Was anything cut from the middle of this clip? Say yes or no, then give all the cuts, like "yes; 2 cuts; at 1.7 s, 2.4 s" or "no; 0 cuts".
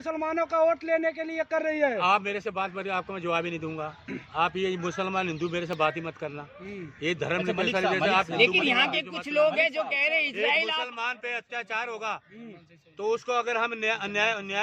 no; 0 cuts